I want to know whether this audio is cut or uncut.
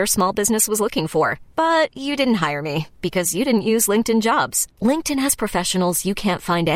uncut